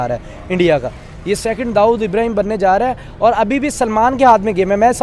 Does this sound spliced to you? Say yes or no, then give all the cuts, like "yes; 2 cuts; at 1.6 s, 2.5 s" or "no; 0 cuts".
no; 0 cuts